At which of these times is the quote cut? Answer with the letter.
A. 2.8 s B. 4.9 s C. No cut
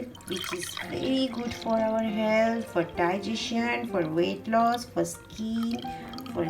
C